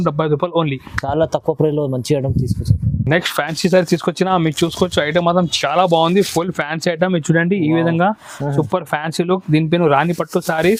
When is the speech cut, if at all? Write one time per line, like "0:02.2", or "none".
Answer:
none